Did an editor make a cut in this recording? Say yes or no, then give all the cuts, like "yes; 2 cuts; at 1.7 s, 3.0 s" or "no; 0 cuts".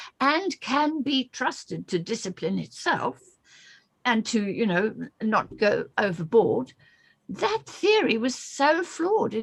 no; 0 cuts